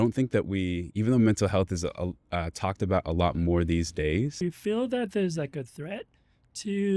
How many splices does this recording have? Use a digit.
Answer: 1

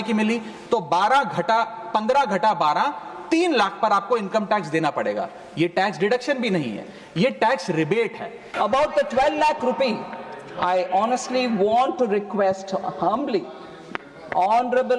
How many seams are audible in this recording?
1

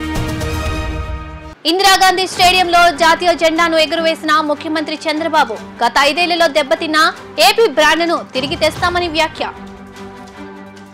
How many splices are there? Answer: 0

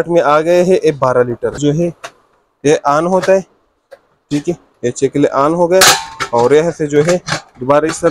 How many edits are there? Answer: 1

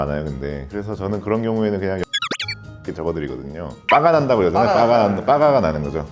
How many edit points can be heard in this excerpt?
1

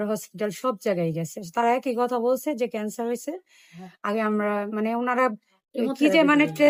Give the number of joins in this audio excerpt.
0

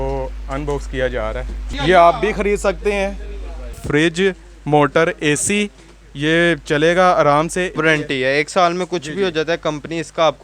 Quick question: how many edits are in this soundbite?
3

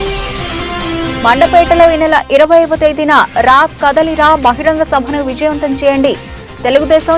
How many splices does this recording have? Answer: 1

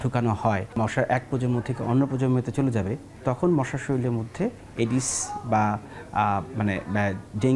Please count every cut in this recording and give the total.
2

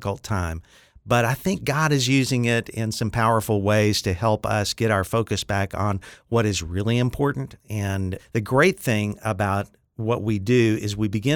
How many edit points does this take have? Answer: 1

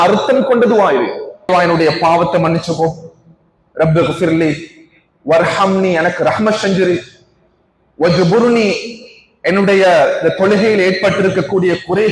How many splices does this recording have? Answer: 1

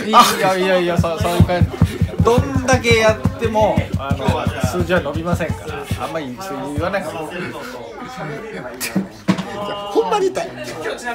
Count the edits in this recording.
0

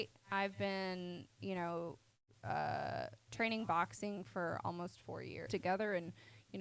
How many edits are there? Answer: 1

